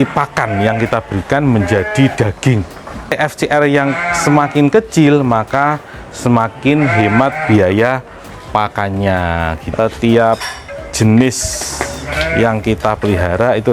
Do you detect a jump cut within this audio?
yes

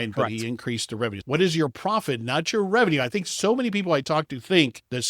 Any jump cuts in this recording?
yes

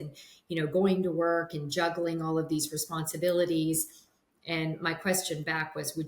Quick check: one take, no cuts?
yes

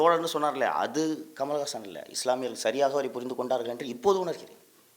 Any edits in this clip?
no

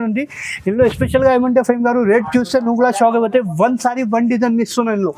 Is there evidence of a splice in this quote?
no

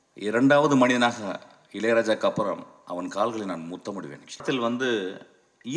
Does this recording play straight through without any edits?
no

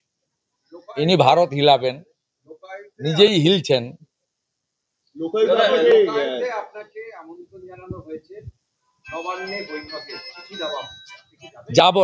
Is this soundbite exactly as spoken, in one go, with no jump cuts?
yes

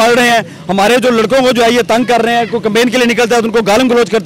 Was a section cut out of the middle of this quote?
no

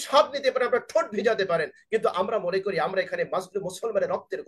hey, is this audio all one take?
yes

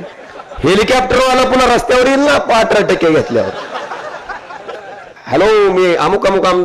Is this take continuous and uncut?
no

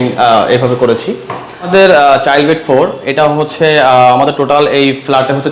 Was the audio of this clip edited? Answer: yes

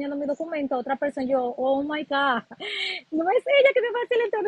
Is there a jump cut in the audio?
no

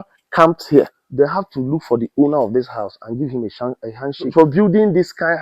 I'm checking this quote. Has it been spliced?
yes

